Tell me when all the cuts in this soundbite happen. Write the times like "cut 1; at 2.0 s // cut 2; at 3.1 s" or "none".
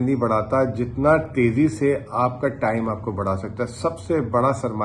none